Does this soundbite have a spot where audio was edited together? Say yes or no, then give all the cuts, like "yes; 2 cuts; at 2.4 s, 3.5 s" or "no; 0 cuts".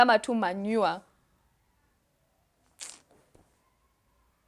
no; 0 cuts